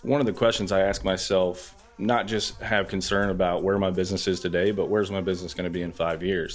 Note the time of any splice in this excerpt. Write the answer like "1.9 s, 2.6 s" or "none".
1.8 s